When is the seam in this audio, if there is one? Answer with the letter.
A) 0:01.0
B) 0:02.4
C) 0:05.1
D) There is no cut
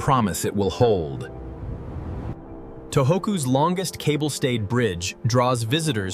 B